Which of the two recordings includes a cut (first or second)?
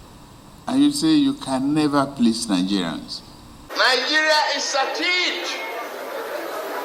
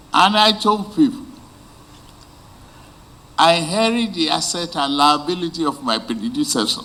first